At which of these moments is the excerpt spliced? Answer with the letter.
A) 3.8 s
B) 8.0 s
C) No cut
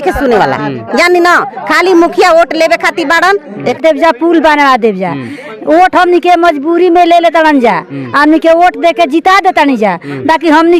A